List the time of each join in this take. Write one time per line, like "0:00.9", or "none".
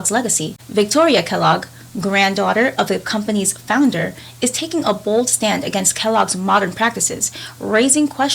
none